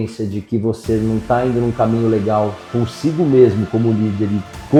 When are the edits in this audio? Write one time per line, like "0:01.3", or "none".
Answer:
none